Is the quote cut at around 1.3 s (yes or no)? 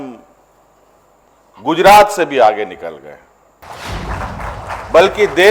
no